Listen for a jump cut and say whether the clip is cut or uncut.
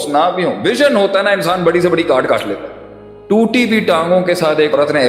cut